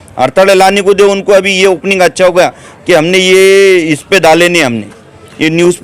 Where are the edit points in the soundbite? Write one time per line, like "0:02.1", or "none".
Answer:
none